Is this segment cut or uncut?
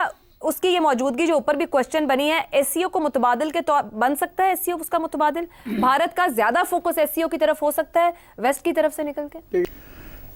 uncut